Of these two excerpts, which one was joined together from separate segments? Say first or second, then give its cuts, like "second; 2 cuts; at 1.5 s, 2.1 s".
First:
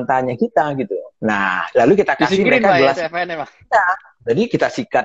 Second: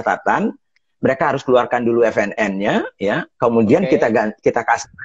first; 1 cut; at 1.1 s